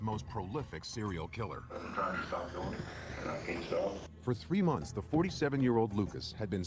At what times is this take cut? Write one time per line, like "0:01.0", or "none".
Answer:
0:01.4